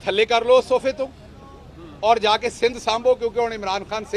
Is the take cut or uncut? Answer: uncut